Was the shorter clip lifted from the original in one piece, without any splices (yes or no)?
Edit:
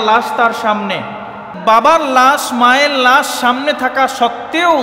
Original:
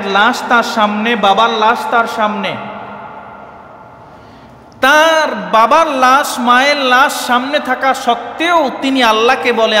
no